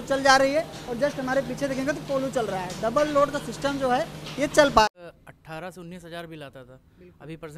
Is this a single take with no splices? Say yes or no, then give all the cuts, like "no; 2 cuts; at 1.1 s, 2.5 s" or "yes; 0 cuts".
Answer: no; 1 cut; at 4.8 s